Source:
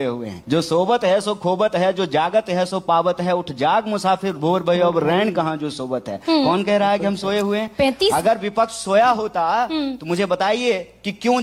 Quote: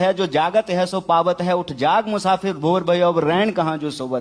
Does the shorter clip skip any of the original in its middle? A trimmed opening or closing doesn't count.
no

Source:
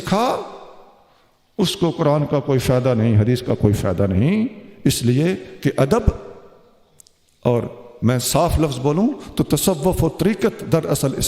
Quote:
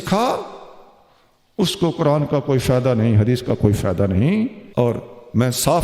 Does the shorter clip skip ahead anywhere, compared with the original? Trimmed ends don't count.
yes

